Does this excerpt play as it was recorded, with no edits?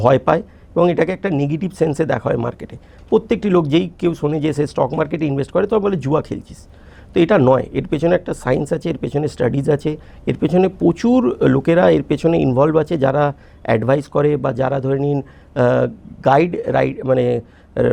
yes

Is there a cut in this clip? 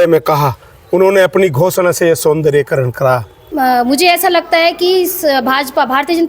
yes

